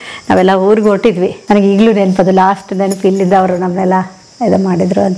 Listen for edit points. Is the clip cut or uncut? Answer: cut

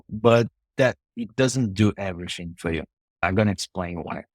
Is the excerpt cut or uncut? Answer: cut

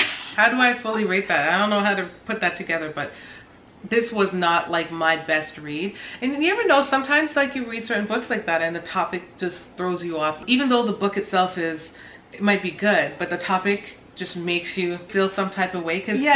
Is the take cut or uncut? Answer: uncut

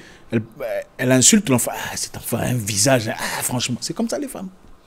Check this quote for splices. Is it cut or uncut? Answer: uncut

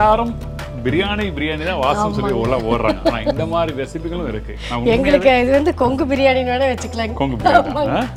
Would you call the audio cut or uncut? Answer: uncut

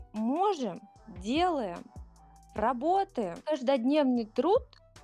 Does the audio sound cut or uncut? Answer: cut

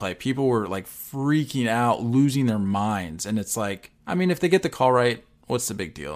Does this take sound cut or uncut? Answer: cut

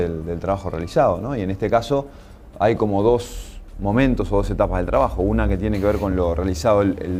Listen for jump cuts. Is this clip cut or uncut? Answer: uncut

